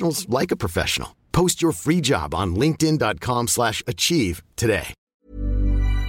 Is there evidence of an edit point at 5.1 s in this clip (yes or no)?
yes